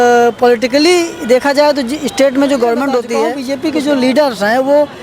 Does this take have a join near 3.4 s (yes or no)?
yes